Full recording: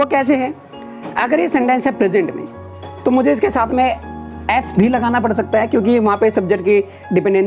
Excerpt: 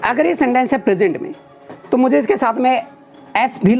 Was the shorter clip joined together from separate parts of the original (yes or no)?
no